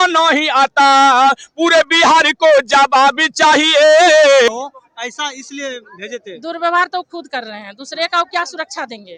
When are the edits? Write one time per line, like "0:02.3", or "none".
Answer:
0:04.5